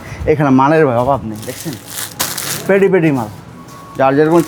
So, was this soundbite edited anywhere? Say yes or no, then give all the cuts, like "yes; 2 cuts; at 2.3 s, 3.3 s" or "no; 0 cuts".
no; 0 cuts